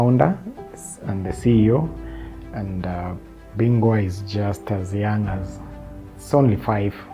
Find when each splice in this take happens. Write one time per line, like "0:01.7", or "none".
0:03.3
0:04.2